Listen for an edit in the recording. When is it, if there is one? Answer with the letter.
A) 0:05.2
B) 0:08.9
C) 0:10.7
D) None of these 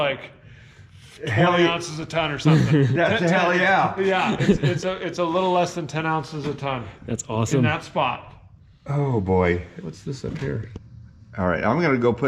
C